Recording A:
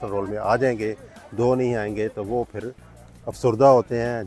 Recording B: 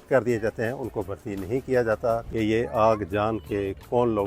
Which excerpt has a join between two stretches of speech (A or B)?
B